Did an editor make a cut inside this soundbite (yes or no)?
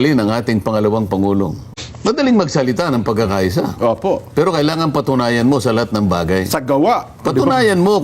yes